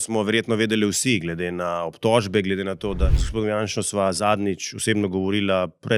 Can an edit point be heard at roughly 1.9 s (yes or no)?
no